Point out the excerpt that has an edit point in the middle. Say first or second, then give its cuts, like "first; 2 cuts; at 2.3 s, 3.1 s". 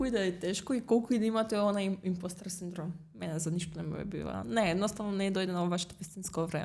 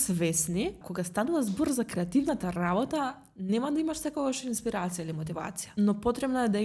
second; 2 cuts; at 0.9 s, 5.6 s